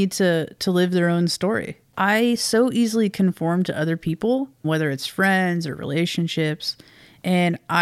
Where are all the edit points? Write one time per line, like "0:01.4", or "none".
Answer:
0:01.8
0:04.6